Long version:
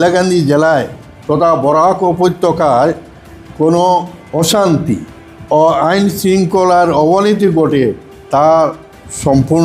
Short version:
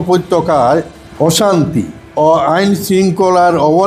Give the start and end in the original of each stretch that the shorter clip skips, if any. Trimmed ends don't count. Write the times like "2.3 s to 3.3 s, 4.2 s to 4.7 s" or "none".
3.1 s to 4.2 s, 5.1 s to 5.3 s